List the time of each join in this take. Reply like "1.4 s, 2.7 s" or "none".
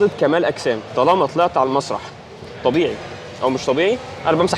none